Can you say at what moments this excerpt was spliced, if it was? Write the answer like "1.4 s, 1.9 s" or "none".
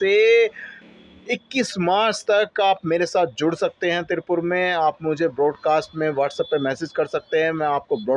none